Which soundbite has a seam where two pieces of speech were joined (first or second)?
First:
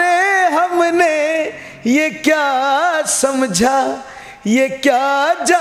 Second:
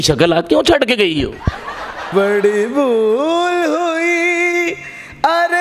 second